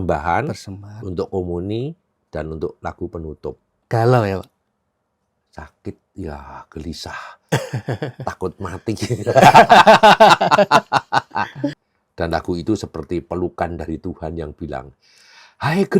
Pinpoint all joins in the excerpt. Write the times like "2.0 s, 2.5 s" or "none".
3.7 s, 11.7 s